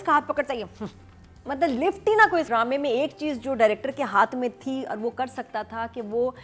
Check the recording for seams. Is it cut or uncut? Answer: cut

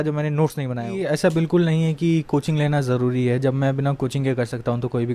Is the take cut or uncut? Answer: cut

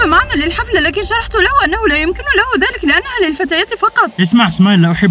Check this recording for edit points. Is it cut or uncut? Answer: cut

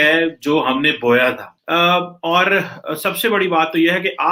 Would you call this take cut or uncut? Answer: uncut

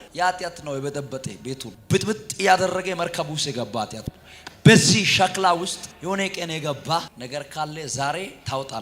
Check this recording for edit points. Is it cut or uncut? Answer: cut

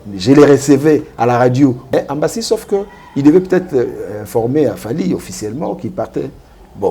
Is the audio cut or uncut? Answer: cut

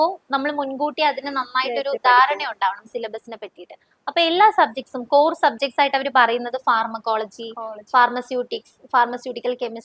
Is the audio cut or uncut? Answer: uncut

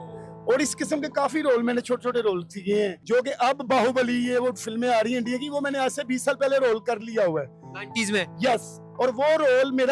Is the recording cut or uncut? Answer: cut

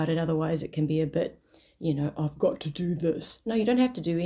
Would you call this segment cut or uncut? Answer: uncut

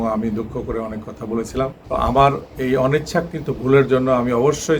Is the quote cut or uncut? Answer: cut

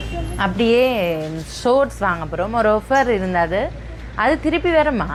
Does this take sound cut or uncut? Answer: uncut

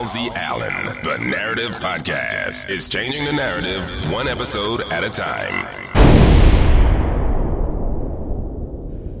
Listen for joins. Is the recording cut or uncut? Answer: uncut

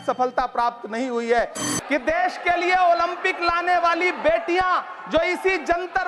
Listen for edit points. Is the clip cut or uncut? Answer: cut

